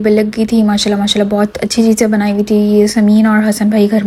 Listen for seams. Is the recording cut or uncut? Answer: uncut